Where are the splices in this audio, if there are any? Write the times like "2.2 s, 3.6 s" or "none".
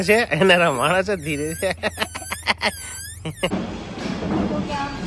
3.5 s